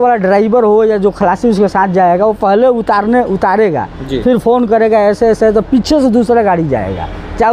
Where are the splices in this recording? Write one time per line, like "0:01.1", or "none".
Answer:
none